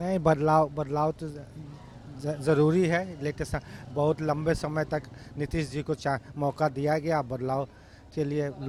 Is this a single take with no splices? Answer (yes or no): yes